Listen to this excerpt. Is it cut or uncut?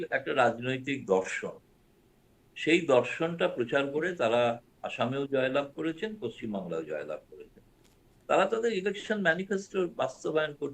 uncut